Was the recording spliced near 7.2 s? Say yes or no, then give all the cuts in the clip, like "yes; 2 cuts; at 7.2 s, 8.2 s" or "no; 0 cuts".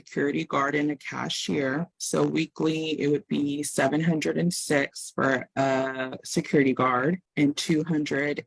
yes; 2 cuts; at 2.0 s, 7.2 s